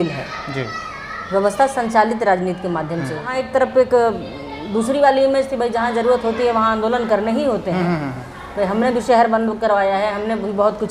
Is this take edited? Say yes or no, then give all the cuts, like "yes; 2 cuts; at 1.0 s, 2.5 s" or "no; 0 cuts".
yes; 1 cut; at 3.4 s